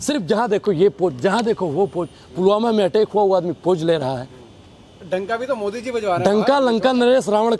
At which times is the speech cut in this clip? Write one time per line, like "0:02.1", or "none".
none